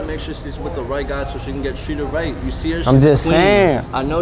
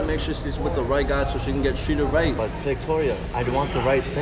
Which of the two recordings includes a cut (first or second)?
second